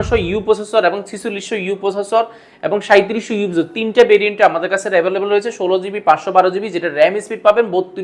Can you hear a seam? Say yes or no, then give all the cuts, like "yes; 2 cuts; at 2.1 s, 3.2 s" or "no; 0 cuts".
no; 0 cuts